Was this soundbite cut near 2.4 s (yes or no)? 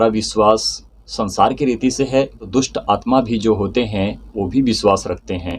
yes